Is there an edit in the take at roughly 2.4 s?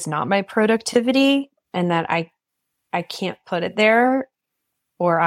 no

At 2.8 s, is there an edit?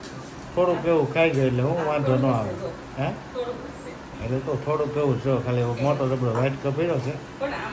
no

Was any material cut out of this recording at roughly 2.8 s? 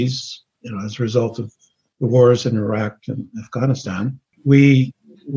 no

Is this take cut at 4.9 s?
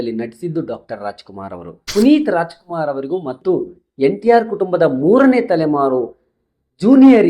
no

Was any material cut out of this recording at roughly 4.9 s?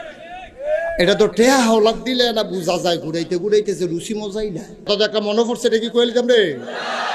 yes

